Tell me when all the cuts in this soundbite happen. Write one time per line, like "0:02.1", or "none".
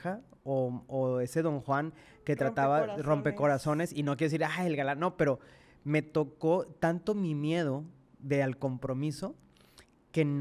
none